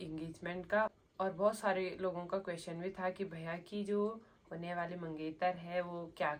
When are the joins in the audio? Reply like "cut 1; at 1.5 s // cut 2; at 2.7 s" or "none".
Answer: none